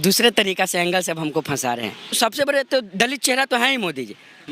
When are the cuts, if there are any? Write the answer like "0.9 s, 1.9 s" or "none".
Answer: 2.2 s